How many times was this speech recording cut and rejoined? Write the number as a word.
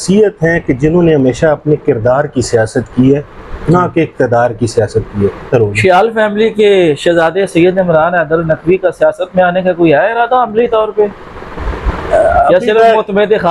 one